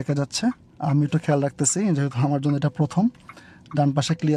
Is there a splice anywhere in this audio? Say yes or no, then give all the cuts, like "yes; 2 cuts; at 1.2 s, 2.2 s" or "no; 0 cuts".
no; 0 cuts